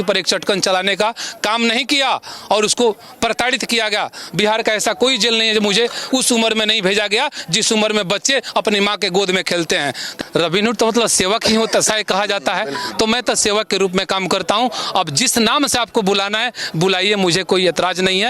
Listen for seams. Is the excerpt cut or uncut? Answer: cut